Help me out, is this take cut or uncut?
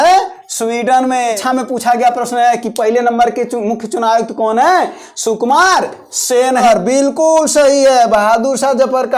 cut